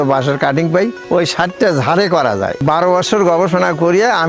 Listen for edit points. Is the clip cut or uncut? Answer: cut